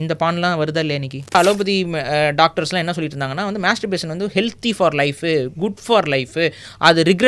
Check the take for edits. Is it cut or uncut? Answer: cut